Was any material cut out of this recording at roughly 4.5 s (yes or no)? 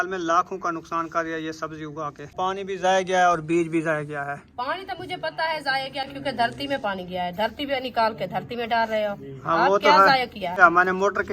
no